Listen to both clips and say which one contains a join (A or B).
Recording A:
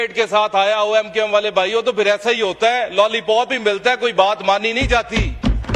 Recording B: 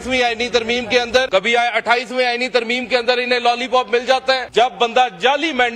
B